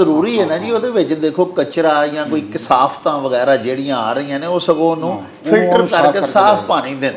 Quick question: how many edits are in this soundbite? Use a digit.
0